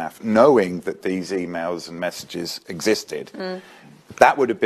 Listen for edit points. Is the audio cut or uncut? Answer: cut